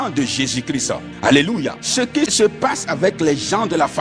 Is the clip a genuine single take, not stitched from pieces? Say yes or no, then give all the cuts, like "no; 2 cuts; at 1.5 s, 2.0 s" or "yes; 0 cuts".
no; 2 cuts; at 1.1 s, 2.1 s